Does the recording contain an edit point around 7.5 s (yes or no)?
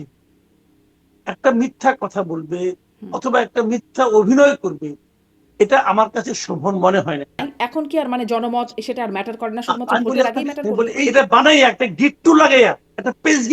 yes